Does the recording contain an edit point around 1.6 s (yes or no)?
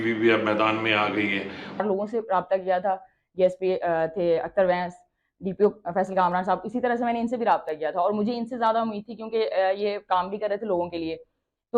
yes